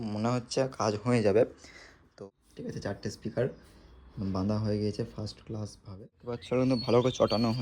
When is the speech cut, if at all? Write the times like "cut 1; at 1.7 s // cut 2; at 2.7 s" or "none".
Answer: cut 1; at 2.2 s // cut 2; at 6.3 s